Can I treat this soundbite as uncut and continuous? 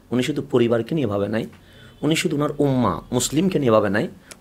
yes; 0 cuts

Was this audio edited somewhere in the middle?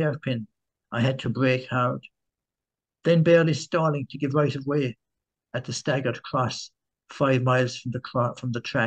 no; 0 cuts

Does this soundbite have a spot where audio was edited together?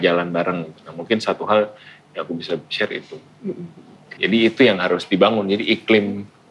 yes; 1 cut; at 4.0 s

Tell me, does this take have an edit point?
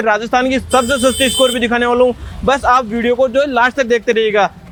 no; 0 cuts

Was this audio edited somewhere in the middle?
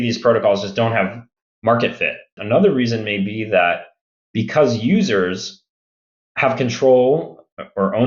yes; 1 cut; at 2.3 s

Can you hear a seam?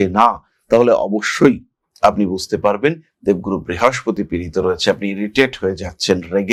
no; 0 cuts

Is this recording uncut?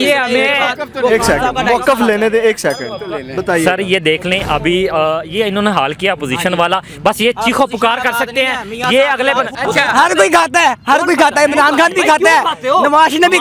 no; 1 cut; at 9.5 s

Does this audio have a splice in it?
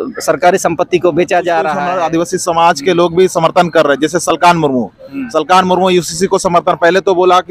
yes; 1 cut; at 1.9 s

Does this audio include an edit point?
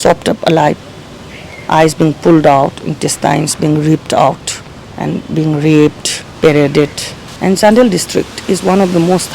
yes; 1 cut; at 7.3 s

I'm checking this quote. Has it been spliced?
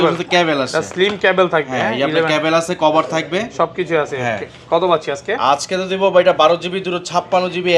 no; 0 cuts

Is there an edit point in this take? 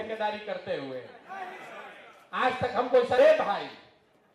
yes; 1 cut; at 3.2 s

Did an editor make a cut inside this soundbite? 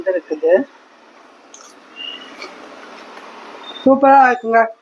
no; 0 cuts

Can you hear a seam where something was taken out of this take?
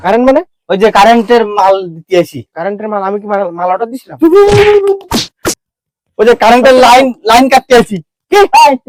no; 0 cuts

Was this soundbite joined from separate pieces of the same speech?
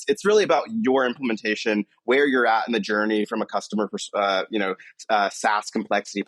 no; 0 cuts

